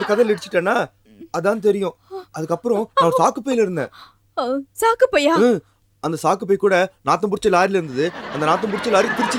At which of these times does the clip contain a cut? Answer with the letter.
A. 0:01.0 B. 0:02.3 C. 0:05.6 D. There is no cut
D